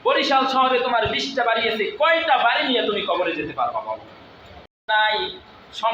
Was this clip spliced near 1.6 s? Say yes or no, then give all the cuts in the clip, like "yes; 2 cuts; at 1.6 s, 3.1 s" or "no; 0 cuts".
no; 1 cut; at 4.9 s